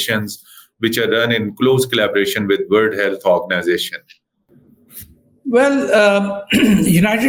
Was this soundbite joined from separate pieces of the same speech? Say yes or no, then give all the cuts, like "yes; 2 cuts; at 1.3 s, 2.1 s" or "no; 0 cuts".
no; 0 cuts